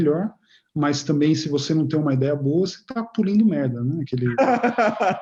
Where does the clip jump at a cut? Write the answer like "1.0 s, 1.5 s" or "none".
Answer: none